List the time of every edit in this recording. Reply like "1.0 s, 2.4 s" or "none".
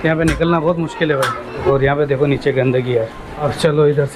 1.6 s